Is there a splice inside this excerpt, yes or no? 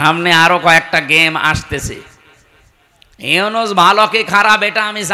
no